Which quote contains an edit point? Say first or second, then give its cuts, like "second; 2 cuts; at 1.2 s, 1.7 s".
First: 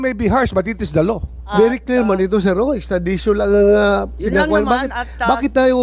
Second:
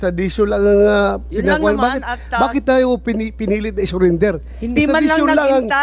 first; 1 cut; at 1.5 s